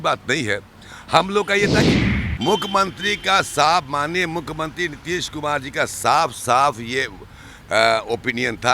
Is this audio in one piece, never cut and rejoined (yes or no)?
no